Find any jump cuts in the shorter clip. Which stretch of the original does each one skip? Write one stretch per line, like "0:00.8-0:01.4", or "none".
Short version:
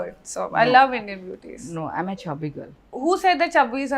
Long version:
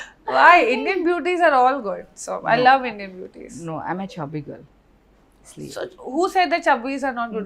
0:04.8-0:06.0